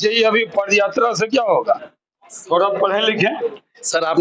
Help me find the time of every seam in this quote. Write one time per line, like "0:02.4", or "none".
none